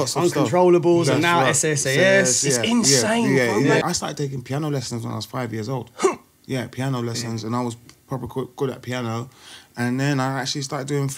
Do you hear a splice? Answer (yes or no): yes